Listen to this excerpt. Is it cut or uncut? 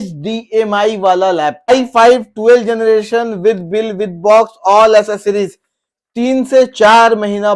cut